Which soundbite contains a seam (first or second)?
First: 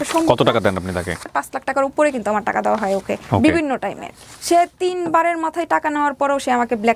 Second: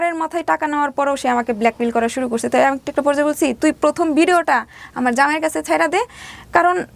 first